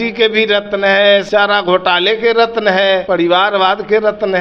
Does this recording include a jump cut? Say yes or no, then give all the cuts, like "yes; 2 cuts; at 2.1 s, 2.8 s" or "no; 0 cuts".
yes; 2 cuts; at 1.3 s, 3.0 s